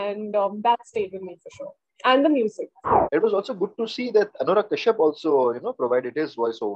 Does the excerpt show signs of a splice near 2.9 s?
yes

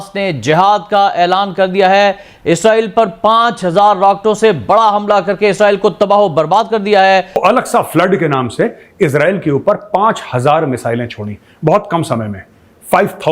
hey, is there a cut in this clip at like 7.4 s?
yes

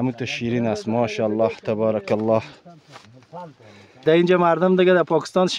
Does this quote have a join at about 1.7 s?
no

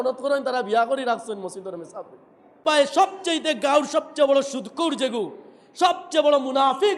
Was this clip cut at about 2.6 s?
yes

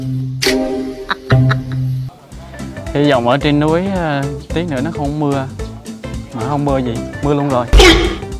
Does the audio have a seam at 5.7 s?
no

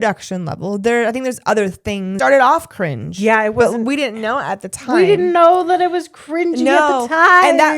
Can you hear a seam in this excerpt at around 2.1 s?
yes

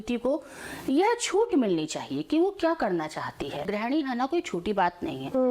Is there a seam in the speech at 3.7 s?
yes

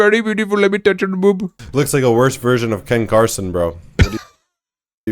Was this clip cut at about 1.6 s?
yes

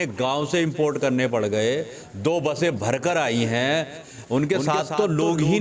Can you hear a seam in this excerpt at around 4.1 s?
yes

